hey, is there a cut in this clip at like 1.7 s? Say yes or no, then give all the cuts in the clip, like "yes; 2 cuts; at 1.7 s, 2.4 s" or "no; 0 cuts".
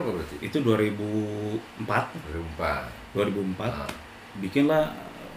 yes; 2 cuts; at 1.7 s, 4.3 s